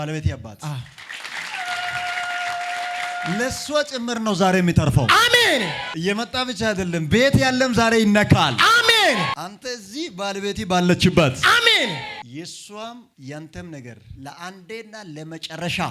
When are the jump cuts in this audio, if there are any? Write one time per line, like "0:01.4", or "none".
none